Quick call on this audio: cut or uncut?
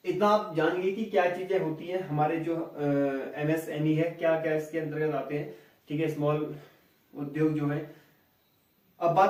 uncut